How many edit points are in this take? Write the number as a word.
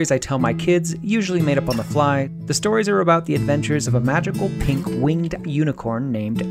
one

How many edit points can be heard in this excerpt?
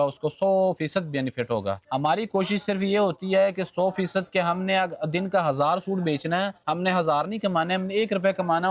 two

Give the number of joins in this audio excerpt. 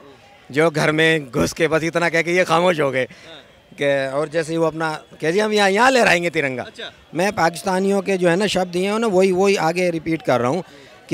one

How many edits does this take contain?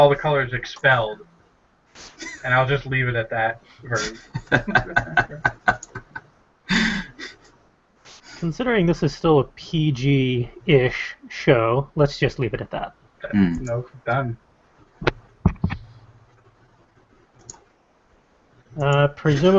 one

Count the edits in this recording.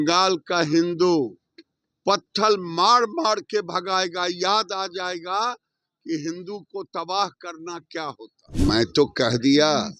one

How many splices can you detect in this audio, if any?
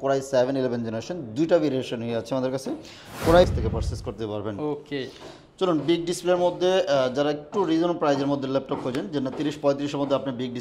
one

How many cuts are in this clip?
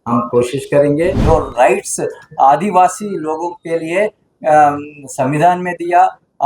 one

